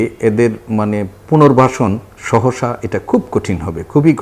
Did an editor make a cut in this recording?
yes; 1 cut; at 2.1 s

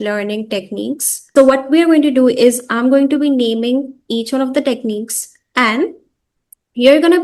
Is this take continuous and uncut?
no; 1 cut; at 1.3 s

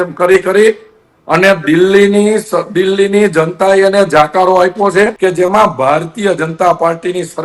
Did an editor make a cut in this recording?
yes; 1 cut; at 5.1 s

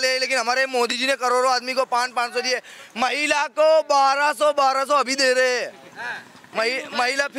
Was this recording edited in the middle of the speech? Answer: no; 0 cuts

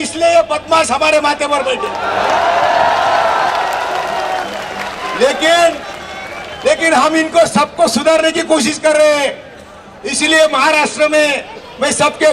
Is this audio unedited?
yes; 0 cuts

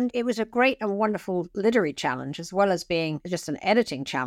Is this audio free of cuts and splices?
yes; 0 cuts

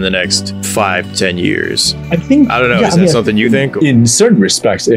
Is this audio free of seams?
yes; 0 cuts

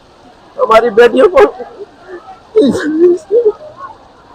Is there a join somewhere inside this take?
no; 0 cuts

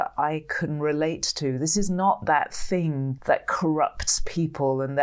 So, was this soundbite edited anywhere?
yes; 1 cut; at 3.1 s

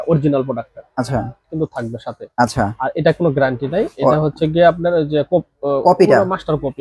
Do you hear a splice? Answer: yes; 1 cut; at 1.5 s

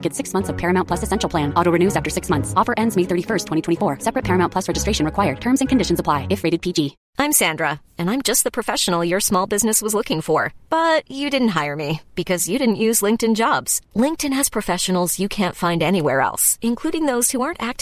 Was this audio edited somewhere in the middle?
yes; 1 cut; at 7.0 s

